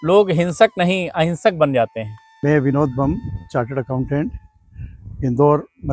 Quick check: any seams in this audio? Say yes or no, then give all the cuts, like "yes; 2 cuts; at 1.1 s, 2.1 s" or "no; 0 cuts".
yes; 1 cut; at 2.3 s